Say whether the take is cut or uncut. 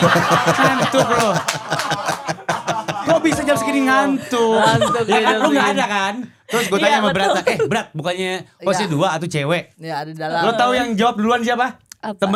uncut